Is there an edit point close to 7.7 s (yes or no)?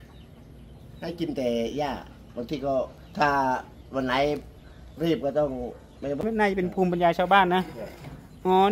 no